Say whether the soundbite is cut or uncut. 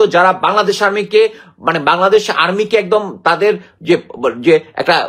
uncut